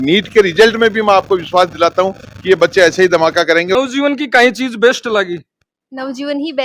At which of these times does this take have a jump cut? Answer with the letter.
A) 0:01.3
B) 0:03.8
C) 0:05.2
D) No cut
B